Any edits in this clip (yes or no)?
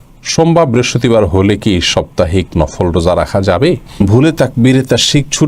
yes